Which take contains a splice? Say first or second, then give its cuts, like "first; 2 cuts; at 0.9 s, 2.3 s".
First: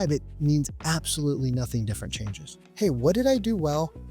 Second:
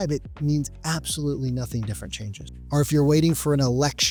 first; 1 cut; at 2.6 s